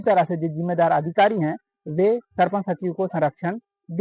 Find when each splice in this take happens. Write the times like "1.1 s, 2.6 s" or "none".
none